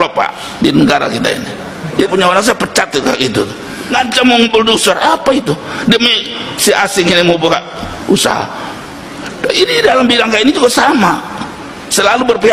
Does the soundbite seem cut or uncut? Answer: cut